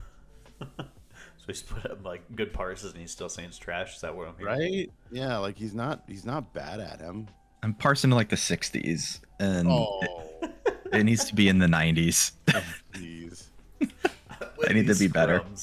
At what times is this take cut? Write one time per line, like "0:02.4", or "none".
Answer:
none